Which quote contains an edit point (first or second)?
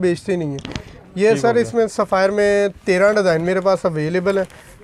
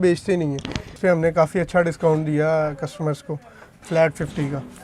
second